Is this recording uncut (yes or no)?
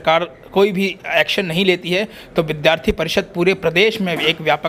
yes